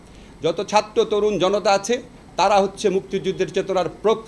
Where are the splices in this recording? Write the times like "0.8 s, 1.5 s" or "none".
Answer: none